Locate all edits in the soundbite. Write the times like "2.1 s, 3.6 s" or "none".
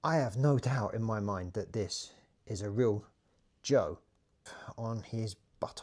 4.6 s